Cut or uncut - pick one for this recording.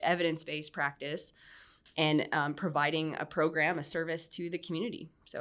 uncut